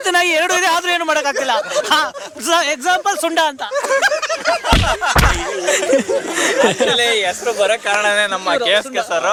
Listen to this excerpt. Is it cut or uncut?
uncut